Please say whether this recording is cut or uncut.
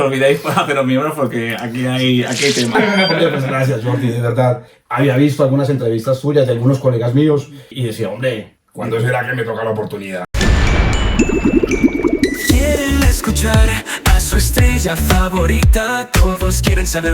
cut